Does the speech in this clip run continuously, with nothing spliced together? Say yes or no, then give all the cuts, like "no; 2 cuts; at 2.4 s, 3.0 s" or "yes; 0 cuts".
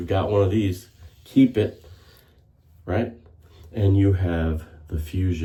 yes; 0 cuts